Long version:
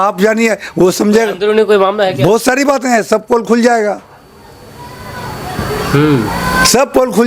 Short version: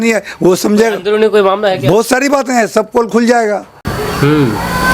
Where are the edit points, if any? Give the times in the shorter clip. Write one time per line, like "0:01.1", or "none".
0:03.8